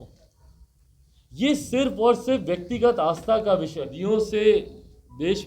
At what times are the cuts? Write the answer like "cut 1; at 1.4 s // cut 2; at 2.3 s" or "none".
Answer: cut 1; at 3.9 s